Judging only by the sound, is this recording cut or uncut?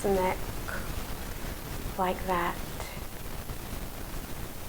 uncut